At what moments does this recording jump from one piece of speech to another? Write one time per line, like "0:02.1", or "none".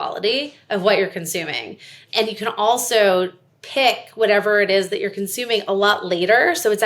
0:02.0